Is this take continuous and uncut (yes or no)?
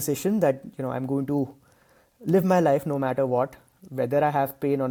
yes